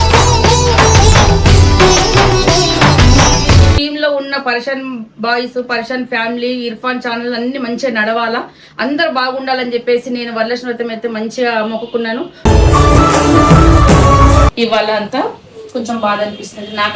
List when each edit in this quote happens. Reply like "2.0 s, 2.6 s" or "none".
3.8 s, 12.4 s, 14.5 s